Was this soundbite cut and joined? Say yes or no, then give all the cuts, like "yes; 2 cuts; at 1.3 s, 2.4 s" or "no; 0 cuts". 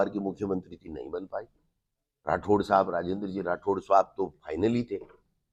no; 0 cuts